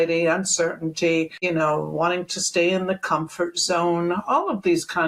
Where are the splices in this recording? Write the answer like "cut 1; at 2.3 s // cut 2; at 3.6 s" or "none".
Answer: cut 1; at 1.4 s